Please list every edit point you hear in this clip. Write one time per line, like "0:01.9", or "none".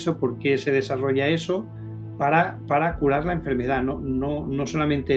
none